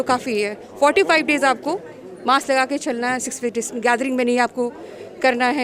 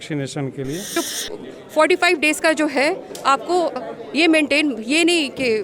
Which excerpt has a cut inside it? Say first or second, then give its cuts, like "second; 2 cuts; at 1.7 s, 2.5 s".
second; 1 cut; at 0.9 s